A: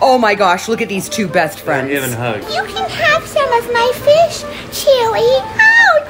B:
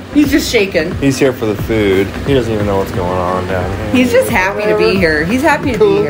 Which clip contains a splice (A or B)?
A